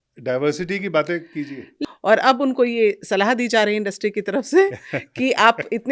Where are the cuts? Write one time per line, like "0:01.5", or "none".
0:01.7